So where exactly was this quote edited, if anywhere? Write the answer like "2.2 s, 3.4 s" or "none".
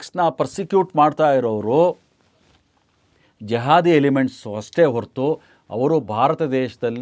none